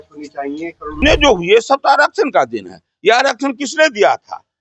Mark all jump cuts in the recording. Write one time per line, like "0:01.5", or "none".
0:01.0